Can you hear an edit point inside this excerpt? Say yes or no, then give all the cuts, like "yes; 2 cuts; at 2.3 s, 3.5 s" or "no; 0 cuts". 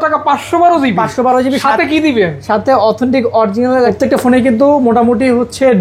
yes; 1 cut; at 3.9 s